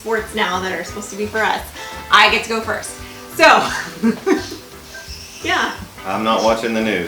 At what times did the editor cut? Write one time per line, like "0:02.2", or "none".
none

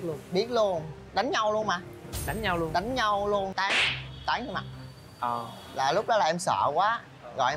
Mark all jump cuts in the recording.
0:03.5

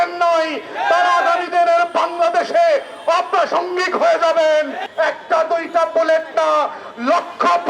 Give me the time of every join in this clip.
0:04.8

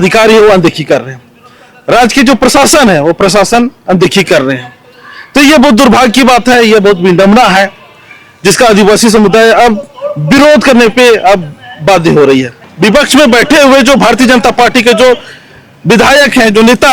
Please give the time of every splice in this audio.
0:12.6

